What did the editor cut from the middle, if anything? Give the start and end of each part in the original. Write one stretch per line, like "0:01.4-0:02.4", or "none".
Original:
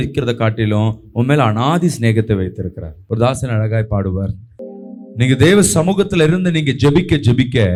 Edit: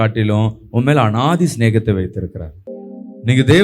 0:02.9-0:04.4